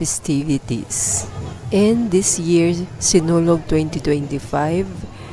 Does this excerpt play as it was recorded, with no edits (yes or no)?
yes